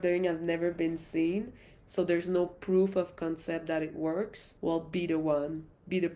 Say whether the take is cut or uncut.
cut